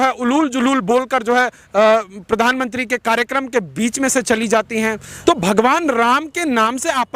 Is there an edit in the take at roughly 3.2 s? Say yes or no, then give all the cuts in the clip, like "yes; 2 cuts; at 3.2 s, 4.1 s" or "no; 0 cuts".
no; 1 cut; at 5.1 s